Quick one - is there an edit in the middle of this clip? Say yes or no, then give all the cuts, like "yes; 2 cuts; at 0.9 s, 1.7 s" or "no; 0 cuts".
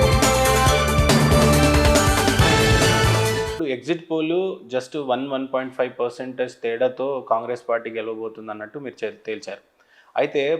yes; 1 cut; at 3.6 s